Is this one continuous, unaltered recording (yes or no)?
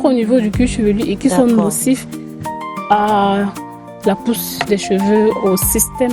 yes